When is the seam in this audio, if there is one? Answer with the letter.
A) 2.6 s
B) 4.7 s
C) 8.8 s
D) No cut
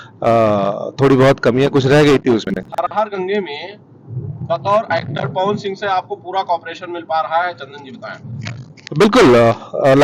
A